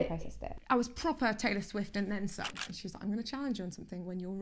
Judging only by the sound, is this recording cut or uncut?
cut